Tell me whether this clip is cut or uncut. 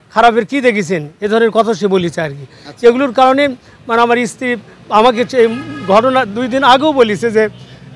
uncut